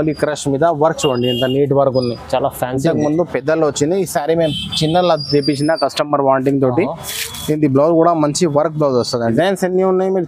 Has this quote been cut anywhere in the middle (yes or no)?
yes